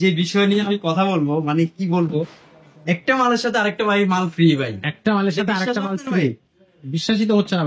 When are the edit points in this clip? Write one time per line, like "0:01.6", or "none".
none